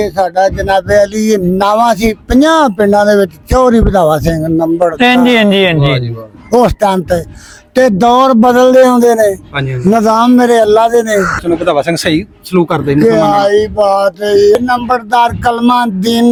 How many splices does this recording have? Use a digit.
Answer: 0